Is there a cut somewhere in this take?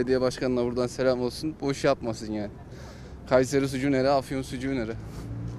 no; 0 cuts

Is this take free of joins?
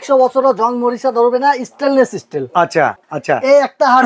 no; 1 cut; at 3.1 s

